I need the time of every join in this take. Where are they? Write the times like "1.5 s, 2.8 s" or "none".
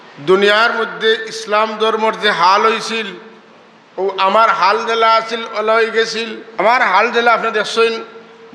6.6 s